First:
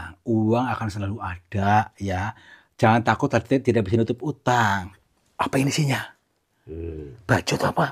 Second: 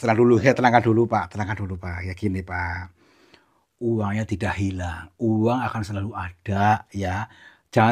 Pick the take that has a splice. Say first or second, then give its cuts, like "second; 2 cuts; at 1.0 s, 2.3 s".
first; 1 cut; at 4.9 s